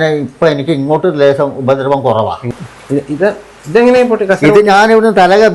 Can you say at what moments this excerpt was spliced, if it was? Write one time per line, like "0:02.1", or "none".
0:02.4